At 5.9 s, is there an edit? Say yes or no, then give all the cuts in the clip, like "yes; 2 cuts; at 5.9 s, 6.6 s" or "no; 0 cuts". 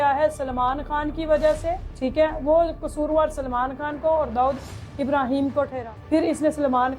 yes; 1 cut; at 5.9 s